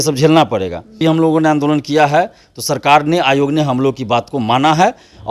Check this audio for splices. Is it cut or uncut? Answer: cut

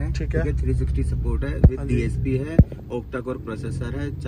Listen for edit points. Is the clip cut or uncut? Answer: uncut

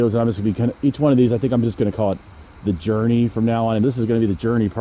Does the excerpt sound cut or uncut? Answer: cut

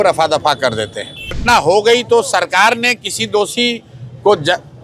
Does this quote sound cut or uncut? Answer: cut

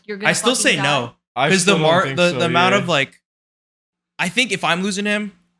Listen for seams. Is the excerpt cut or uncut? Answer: uncut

